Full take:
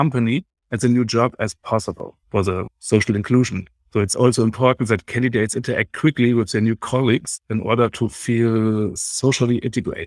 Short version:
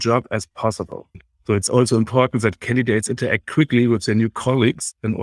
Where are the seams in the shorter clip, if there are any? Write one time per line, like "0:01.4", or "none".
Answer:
0:01.1